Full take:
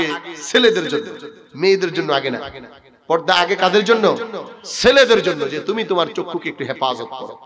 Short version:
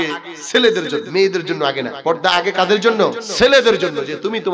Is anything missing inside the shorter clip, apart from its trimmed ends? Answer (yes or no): yes